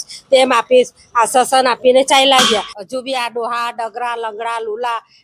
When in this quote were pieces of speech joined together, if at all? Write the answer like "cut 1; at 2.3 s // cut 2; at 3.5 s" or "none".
cut 1; at 2.7 s